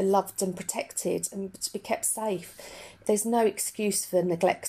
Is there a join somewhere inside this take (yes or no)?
yes